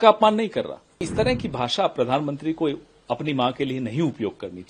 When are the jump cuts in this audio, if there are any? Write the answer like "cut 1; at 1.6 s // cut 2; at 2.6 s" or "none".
cut 1; at 1.1 s